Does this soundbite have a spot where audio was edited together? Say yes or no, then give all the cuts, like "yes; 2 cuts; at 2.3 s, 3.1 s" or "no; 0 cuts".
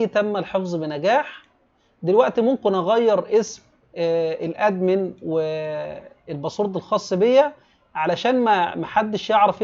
no; 0 cuts